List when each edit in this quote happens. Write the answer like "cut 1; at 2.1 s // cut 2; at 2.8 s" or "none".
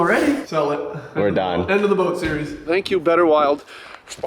cut 1; at 0.8 s // cut 2; at 2.6 s